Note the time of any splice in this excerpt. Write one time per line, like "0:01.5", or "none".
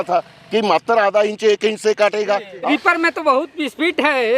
0:02.7